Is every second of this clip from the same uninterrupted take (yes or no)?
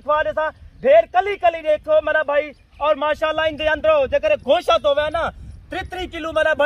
yes